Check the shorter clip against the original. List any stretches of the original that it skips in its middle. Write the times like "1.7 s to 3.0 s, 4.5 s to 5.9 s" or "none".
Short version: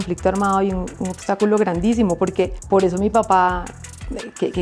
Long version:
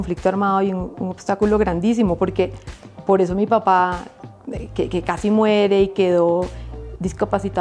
2.6 s to 2.9 s